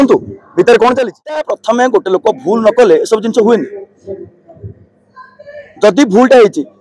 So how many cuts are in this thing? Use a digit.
1